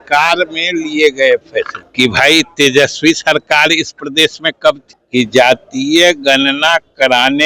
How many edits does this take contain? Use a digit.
2